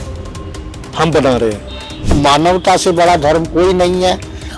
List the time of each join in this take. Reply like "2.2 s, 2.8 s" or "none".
2.2 s